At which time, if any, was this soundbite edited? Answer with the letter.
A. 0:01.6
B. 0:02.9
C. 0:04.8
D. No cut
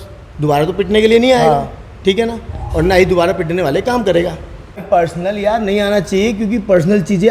C